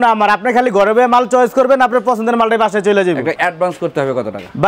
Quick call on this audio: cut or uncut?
cut